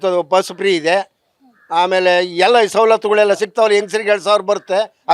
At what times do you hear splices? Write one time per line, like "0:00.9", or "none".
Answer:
none

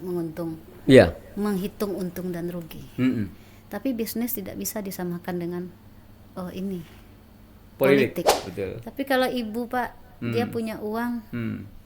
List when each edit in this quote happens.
0:08.4

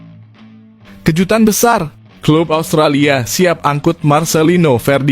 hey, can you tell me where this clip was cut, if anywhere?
0:01.1

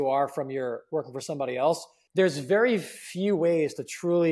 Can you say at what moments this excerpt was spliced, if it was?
0:01.9

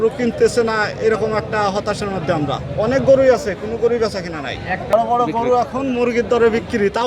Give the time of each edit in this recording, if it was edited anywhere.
0:04.9

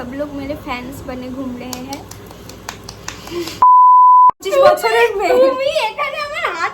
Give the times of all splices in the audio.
0:03.5
0:04.4

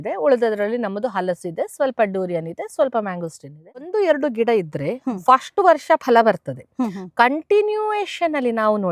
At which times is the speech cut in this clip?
0:03.8

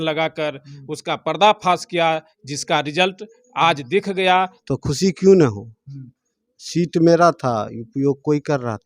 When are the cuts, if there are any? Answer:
0:04.6

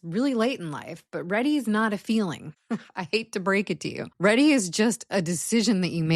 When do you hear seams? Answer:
0:02.5
0:04.0

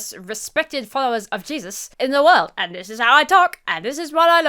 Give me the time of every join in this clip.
0:01.8

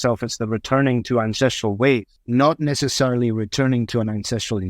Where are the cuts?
0:02.2

